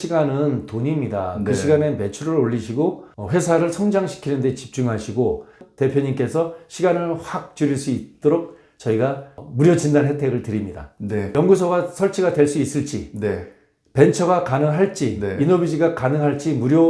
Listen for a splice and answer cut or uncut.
cut